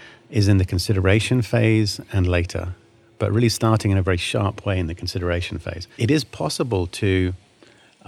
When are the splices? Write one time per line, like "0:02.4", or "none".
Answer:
0:05.8